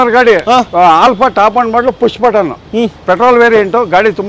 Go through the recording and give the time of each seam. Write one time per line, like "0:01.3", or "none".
none